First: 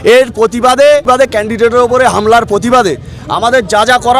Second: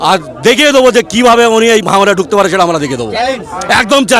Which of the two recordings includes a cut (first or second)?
first